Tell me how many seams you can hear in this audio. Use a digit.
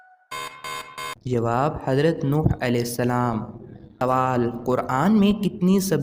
1